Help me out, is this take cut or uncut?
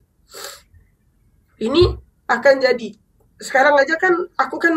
uncut